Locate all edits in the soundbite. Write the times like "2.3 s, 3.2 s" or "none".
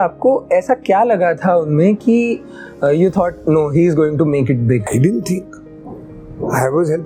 none